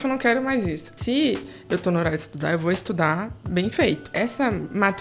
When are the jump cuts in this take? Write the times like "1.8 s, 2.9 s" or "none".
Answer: 0.9 s, 4.1 s